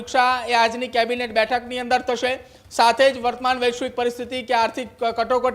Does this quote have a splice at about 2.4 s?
no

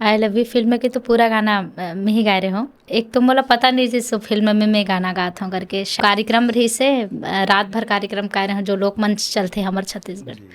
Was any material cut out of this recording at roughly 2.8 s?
yes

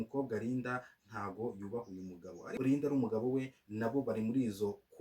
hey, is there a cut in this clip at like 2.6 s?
yes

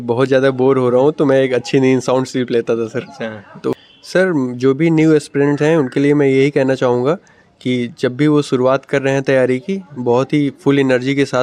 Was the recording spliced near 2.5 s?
no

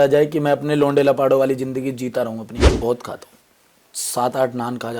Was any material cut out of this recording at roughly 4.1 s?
no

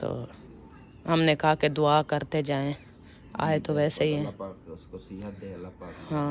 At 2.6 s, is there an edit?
no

